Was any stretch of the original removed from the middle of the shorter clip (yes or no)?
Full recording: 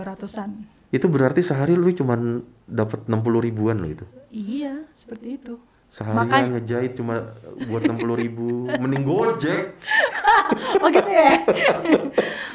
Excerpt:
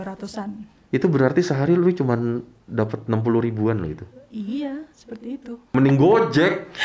yes